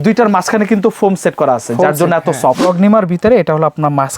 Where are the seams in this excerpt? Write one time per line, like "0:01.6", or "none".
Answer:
0:02.6